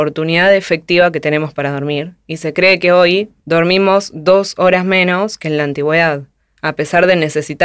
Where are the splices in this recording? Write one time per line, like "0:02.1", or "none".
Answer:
0:03.4